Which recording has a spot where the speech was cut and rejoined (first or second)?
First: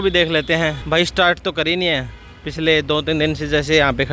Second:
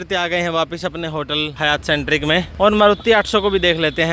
second